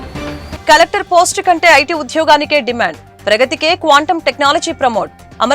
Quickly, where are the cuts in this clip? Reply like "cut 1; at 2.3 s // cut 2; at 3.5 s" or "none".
none